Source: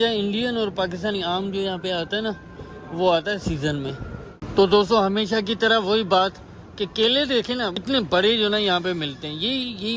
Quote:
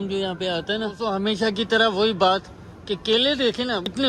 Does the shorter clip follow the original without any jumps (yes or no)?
no